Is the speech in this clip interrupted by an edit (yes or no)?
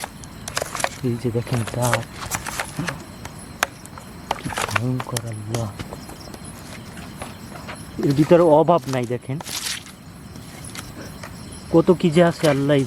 no